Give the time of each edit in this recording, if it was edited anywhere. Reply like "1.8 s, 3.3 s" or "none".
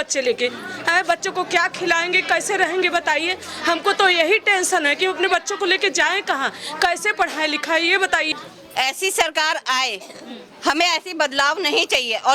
8.3 s